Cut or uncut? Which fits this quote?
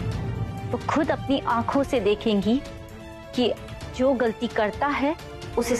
uncut